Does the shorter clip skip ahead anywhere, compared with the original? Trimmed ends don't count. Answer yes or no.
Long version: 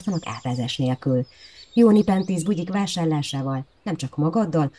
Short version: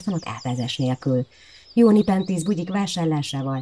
no